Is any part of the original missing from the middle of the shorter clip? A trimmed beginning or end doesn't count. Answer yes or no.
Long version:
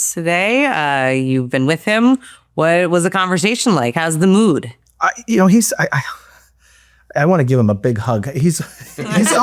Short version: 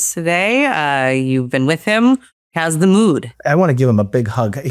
yes